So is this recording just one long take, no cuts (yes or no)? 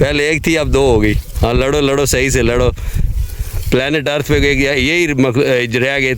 yes